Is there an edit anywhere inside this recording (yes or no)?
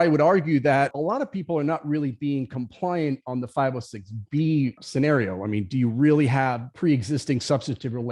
yes